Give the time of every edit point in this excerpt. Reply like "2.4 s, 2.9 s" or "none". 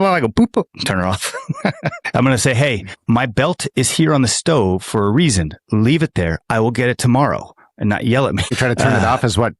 8.6 s